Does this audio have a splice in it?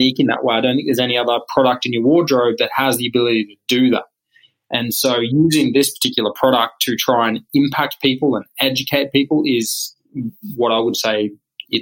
no; 0 cuts

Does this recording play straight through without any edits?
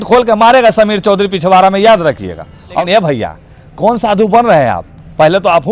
no; 1 cut; at 2.8 s

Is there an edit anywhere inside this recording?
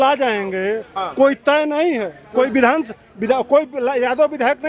yes; 1 cut; at 2.2 s

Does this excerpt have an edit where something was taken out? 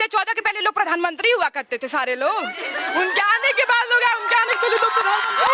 no; 0 cuts

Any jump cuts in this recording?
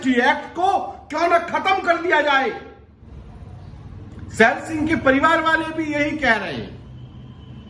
yes; 1 cut; at 3.1 s

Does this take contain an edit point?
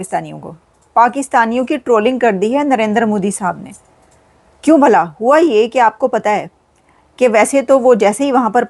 no; 0 cuts

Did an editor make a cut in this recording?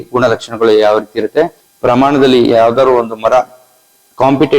yes; 1 cut; at 1.6 s

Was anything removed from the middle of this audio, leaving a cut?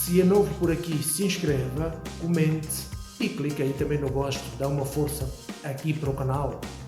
no; 0 cuts

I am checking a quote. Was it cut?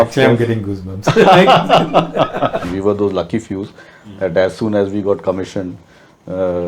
yes; 1 cut; at 2.7 s

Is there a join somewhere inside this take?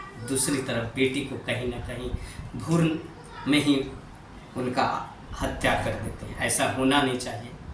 no; 0 cuts

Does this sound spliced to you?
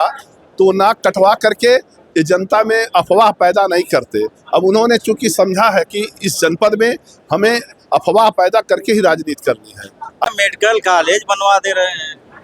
yes; 1 cut; at 10.3 s

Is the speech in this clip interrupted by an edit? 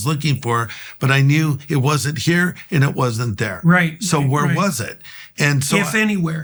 no; 0 cuts

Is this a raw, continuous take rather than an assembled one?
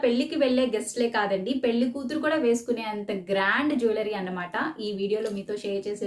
yes; 0 cuts

